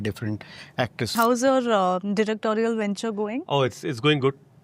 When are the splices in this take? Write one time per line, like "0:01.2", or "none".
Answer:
0:01.1

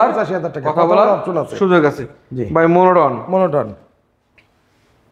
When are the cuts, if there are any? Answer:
none

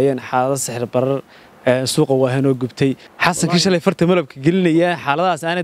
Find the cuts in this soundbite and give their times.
0:03.1

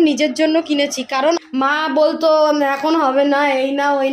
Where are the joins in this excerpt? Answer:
0:01.4

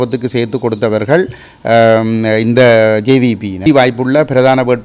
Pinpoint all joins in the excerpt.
0:03.6

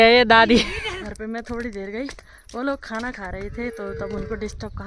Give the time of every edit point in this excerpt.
0:01.1

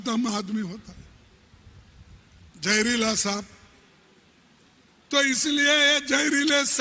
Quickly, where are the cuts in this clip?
none

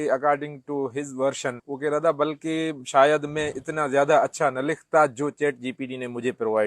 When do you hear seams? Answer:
0:01.7

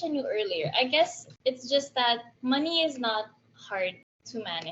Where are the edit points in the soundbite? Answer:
0:01.2
0:02.3

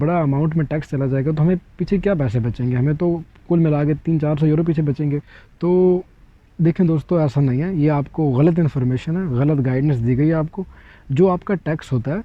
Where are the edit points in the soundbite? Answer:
none

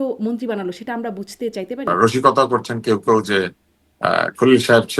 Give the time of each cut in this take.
0:01.9

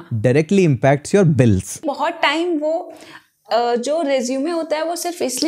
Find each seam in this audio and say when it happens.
0:01.9

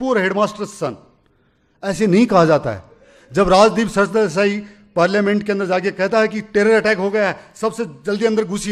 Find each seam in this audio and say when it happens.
none

